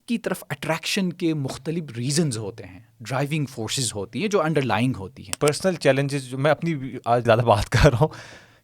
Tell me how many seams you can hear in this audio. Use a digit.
2